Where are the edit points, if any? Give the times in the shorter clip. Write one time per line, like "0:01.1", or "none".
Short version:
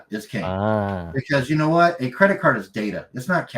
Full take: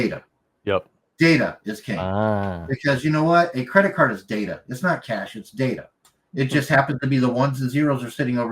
none